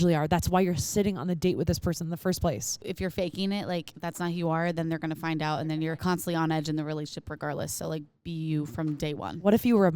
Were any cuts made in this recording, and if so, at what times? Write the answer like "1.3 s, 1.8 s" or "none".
2.7 s, 5.8 s